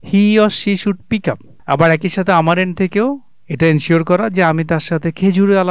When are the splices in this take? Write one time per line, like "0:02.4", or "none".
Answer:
0:01.5